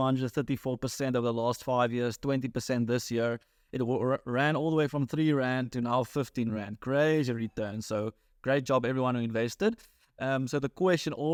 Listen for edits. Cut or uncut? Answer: uncut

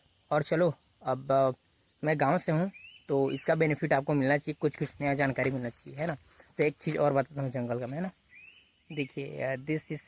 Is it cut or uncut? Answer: uncut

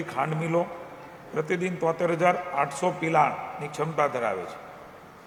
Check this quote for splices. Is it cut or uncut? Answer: uncut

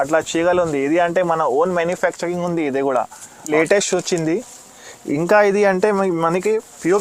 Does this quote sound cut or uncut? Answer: cut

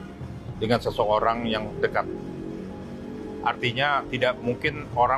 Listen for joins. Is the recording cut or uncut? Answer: uncut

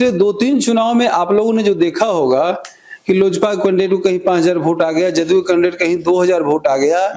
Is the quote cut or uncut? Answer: uncut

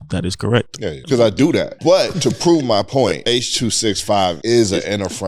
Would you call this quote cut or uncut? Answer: cut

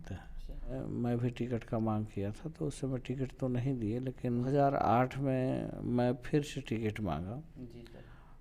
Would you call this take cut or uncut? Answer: cut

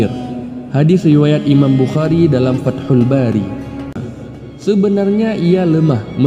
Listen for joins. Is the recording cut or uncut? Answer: cut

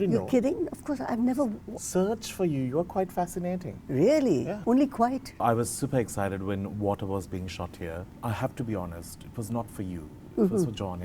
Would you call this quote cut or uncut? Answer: cut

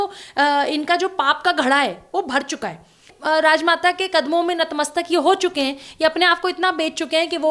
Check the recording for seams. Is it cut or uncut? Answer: cut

